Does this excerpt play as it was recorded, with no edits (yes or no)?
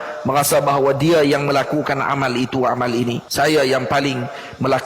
no